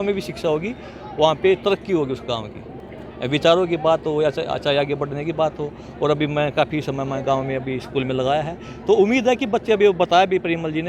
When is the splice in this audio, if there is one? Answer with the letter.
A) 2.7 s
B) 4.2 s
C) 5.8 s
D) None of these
D